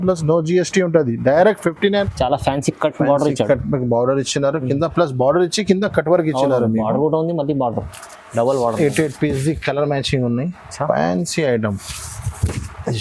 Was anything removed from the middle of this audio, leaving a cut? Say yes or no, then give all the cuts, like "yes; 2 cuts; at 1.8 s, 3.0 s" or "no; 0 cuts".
yes; 1 cut; at 2.0 s